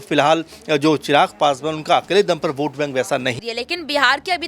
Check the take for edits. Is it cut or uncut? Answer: cut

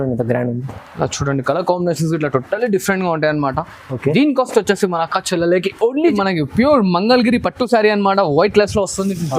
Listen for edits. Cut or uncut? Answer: cut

